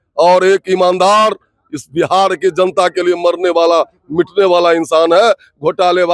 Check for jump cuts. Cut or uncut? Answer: uncut